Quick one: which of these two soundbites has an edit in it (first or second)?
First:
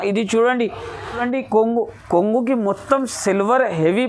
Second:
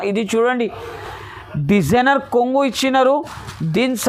first